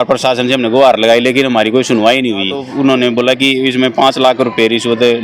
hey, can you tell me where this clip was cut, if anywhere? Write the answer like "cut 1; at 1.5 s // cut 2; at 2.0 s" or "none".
cut 1; at 2.6 s